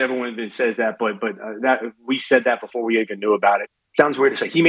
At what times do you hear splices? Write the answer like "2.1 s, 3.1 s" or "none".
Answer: 3.8 s